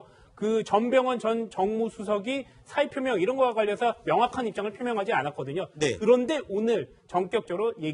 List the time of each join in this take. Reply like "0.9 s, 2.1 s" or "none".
6.3 s